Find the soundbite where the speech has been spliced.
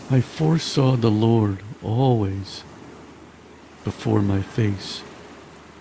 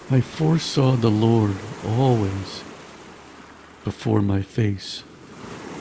second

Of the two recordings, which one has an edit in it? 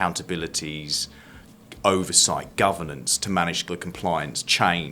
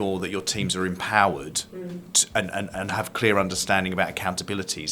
first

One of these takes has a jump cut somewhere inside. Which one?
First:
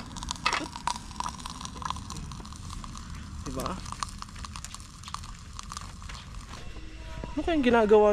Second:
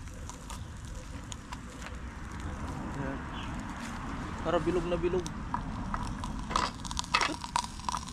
first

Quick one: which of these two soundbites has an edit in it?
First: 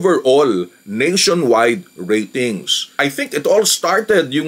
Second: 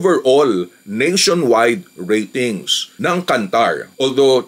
first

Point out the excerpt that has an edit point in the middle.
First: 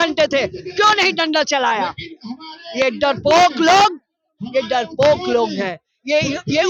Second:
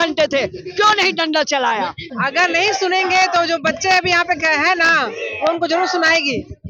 second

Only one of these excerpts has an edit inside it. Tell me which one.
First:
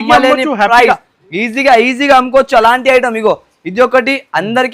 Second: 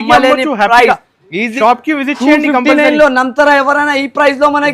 second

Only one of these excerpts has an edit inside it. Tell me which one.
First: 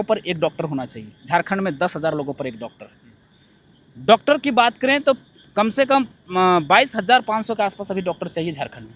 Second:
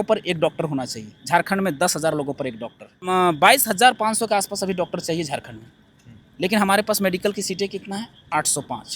second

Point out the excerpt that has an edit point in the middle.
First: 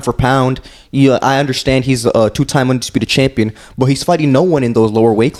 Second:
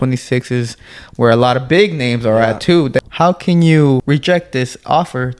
second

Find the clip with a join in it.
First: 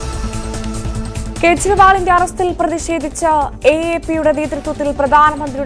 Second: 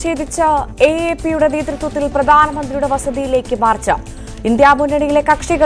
first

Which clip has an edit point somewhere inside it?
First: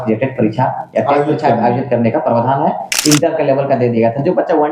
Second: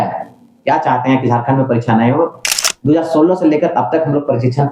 first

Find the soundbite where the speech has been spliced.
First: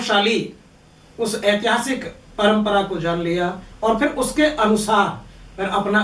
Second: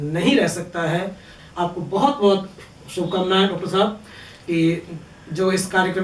second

